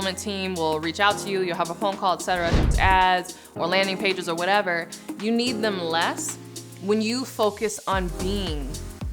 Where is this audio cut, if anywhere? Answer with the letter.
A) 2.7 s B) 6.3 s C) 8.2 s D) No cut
A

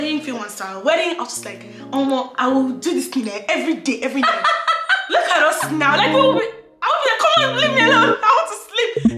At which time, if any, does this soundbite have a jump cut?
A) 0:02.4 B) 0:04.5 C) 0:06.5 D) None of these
D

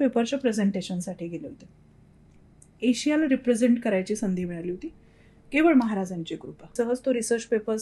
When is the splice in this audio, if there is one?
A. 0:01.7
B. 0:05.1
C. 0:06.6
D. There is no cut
C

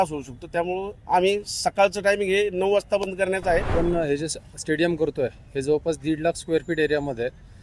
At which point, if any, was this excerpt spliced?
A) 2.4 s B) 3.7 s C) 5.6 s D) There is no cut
B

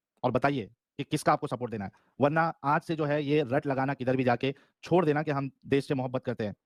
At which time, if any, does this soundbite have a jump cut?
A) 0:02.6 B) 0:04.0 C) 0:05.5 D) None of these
D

